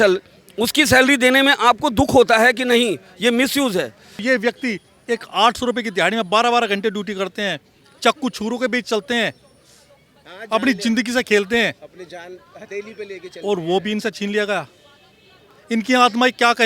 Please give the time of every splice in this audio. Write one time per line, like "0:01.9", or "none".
0:04.2